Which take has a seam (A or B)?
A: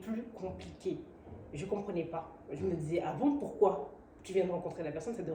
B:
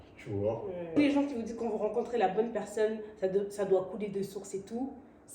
B